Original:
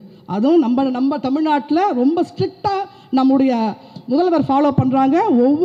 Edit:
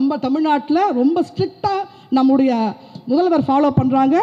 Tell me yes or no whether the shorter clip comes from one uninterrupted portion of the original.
yes